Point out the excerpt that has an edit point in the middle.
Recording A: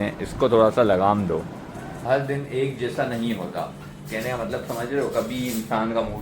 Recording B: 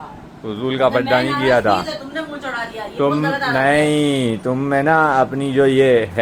A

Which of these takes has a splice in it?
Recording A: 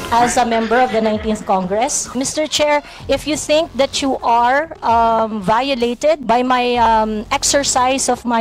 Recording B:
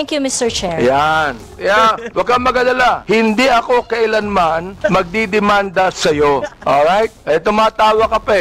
A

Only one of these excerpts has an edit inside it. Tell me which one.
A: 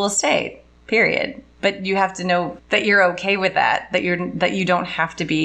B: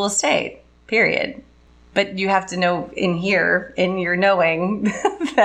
A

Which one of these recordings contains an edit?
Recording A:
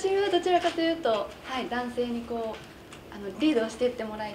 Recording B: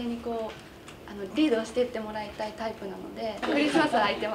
B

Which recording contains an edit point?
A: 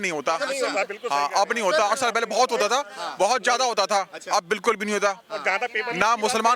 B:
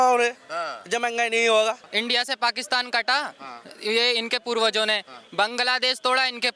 B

